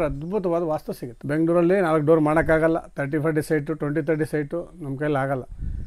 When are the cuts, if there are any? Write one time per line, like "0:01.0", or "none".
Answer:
0:01.1